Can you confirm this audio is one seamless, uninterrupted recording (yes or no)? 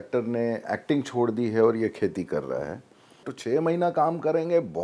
no